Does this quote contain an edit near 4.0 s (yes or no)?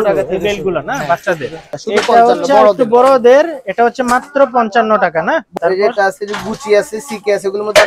no